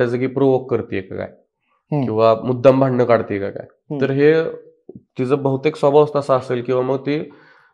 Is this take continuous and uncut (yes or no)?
yes